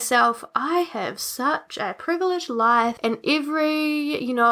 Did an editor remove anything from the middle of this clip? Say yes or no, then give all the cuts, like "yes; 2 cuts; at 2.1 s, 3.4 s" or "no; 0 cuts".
yes; 1 cut; at 3.0 s